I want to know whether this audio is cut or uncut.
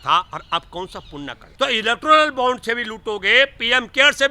cut